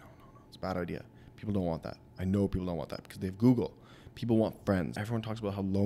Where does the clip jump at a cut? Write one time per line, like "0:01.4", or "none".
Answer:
0:05.0

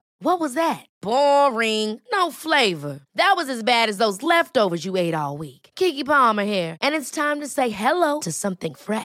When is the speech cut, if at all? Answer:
none

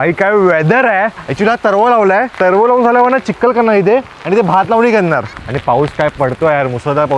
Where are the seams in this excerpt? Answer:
0:01.2
0:02.3
0:05.4

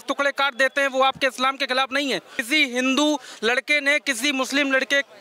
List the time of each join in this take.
0:02.4

